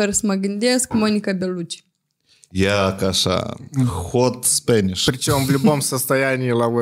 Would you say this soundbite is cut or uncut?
uncut